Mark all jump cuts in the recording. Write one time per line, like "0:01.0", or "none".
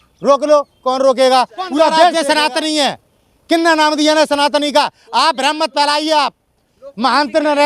0:02.1